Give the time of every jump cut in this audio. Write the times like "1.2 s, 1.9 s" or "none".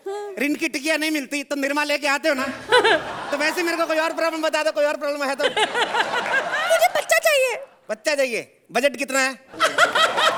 none